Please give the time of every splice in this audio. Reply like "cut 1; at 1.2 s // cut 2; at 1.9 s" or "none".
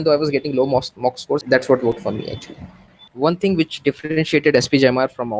cut 1; at 1.4 s // cut 2; at 3.1 s